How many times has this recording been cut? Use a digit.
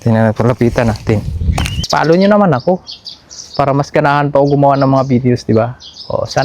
1